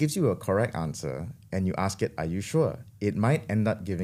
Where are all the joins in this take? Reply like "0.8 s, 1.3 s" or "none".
none